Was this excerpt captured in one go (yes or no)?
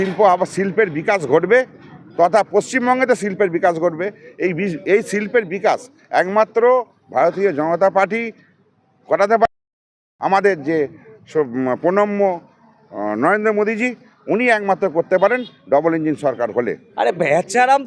yes